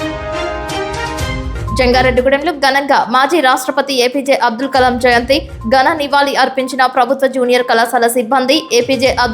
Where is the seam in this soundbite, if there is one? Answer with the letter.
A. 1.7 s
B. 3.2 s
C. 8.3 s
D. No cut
A